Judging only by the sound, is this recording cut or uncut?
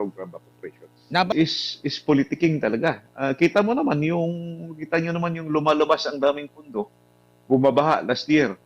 cut